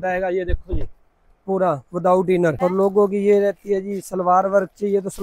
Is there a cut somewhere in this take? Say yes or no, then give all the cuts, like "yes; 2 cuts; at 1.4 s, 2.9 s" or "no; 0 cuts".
yes; 1 cut; at 2.6 s